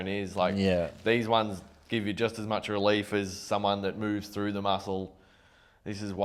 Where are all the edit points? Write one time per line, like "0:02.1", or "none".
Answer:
none